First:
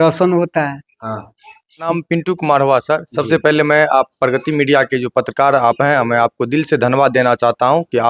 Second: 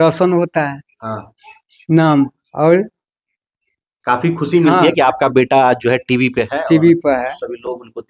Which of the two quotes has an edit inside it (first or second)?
first